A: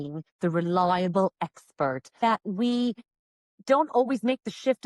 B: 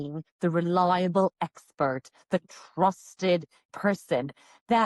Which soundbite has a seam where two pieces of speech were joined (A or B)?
A